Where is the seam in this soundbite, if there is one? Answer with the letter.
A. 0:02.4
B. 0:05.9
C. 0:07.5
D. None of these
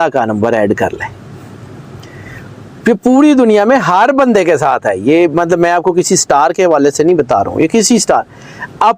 D